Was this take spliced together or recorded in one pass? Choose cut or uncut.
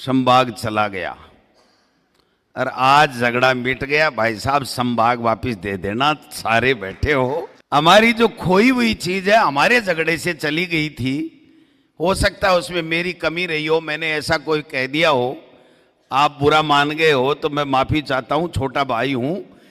cut